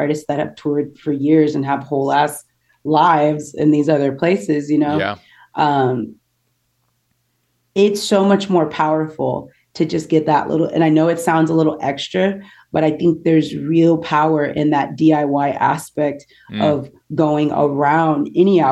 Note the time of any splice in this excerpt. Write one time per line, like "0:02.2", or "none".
none